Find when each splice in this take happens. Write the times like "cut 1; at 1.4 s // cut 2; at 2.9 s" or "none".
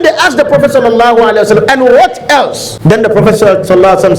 cut 1; at 2.7 s